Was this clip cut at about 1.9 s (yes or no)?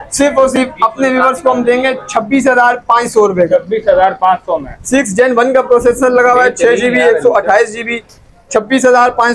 no